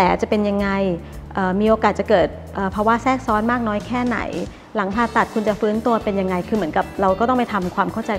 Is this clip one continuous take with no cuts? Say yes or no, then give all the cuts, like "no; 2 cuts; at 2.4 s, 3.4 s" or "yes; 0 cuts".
yes; 0 cuts